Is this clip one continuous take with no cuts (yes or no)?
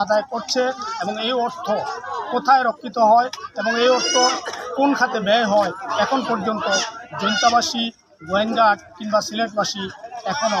yes